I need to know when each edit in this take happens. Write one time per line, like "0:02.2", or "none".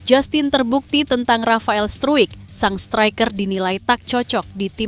none